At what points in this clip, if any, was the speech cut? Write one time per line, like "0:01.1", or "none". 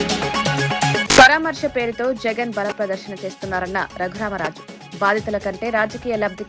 0:01.0

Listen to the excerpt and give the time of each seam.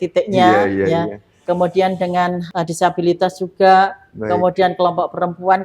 0:02.4

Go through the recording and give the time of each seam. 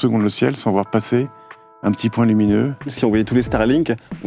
0:02.9

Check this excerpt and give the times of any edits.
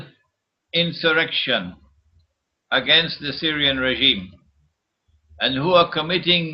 0:05.6

